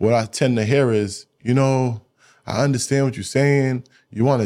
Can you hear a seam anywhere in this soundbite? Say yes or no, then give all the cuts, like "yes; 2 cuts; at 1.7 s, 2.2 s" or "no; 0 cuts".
no; 0 cuts